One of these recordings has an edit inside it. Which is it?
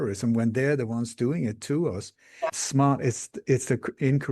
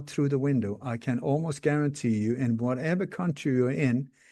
first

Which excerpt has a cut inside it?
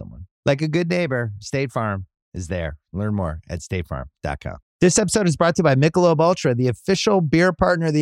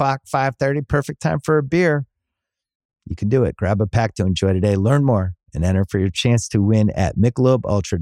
first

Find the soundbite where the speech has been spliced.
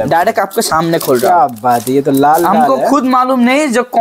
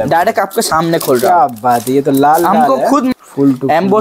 second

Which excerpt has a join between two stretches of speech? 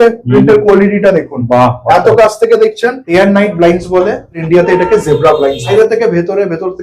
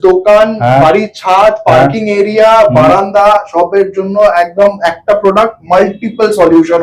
first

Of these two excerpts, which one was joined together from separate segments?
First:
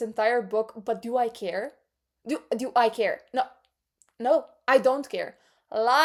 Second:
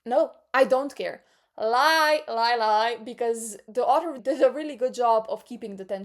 second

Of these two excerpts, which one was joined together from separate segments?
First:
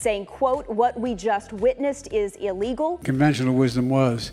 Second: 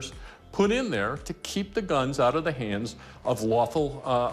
first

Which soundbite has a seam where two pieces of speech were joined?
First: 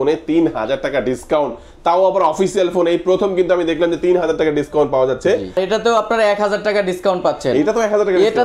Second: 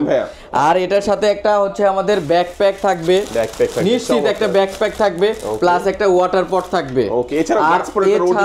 first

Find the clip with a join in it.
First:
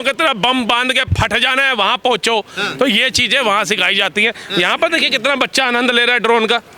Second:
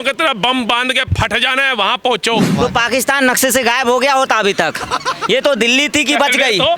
second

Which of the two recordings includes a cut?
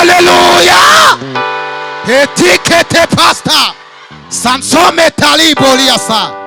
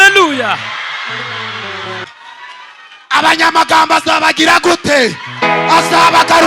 second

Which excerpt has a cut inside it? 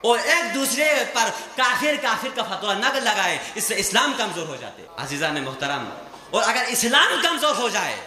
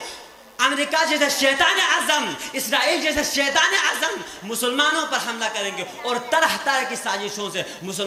first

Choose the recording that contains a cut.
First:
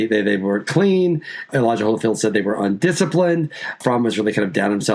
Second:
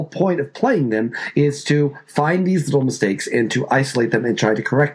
first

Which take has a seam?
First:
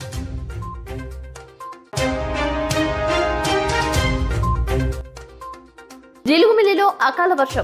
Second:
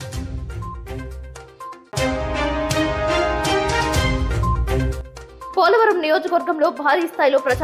first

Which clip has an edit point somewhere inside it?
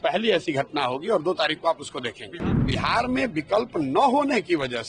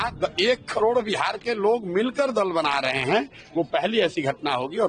first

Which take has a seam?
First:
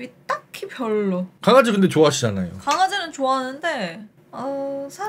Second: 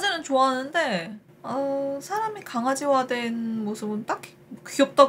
first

